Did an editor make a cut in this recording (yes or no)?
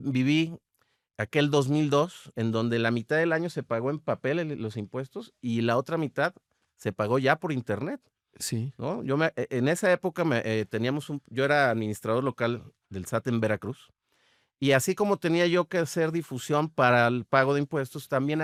no